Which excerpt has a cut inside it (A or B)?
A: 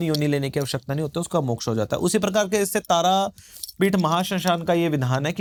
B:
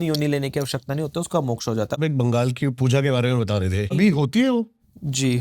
B